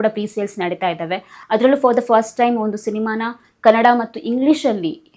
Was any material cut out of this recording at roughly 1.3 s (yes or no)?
yes